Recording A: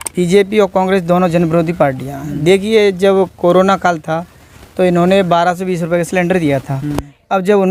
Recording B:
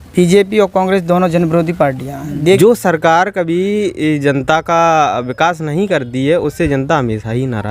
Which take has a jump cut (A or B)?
B